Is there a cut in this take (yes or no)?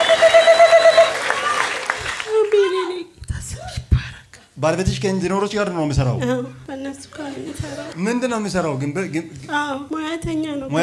yes